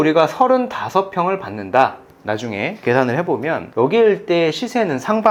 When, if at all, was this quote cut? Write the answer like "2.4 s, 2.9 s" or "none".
none